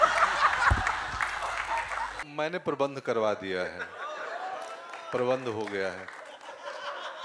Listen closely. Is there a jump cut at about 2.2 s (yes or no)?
yes